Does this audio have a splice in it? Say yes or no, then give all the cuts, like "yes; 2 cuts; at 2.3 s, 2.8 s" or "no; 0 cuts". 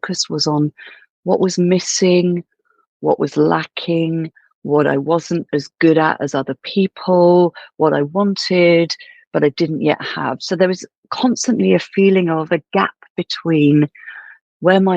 no; 0 cuts